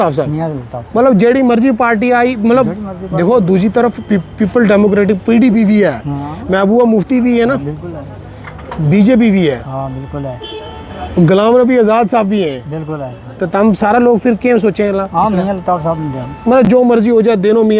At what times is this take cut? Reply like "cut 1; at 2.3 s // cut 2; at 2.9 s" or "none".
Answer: none